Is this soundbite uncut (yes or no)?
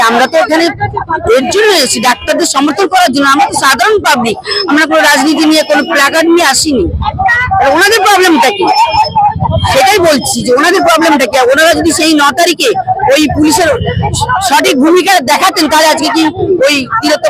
yes